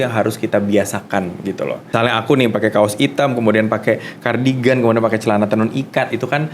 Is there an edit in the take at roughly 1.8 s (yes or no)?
yes